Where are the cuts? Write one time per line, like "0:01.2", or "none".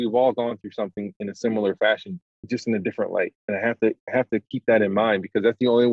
0:02.2